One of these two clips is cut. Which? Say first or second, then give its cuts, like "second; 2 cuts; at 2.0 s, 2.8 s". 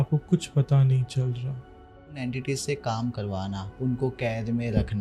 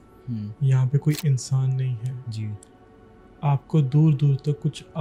first; 1 cut; at 2.1 s